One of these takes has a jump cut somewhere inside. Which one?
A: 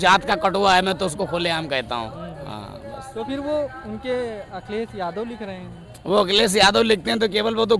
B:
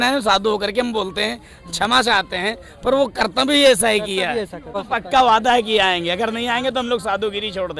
B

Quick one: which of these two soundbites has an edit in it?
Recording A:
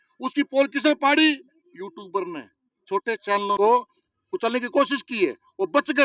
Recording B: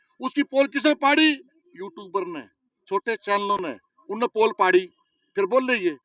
A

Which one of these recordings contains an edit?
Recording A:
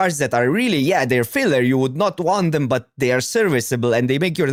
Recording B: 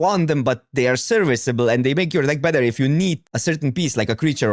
B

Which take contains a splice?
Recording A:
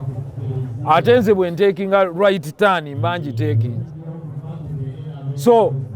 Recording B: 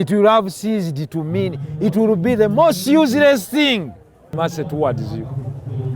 B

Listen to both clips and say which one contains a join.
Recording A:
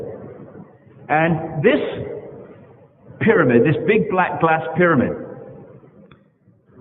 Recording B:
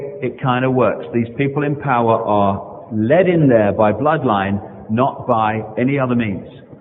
A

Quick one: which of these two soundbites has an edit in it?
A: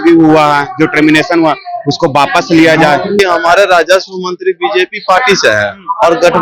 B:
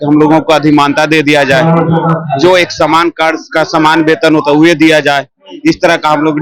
A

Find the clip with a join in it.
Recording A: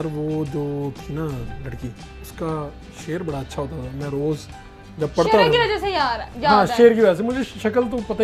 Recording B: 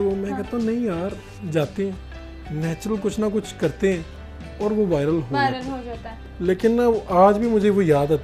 B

